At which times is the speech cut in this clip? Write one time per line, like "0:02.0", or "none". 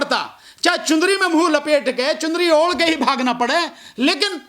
none

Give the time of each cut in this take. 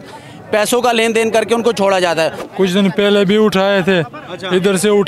0:02.4

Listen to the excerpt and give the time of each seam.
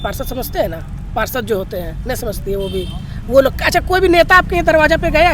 none

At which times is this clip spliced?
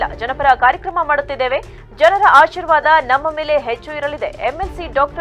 none

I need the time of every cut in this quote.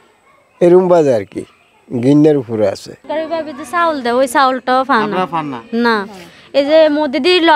0:03.0

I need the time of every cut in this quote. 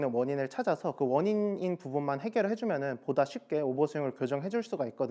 none

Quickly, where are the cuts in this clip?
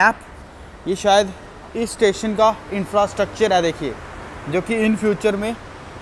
none

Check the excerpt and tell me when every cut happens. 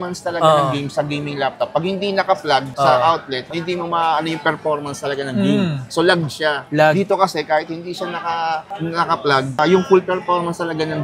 none

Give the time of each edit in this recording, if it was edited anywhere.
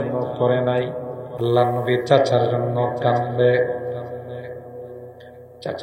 0:01.2

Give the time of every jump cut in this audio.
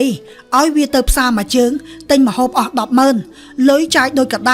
none

